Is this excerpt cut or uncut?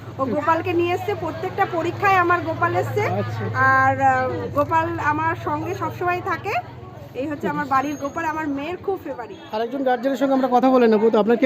cut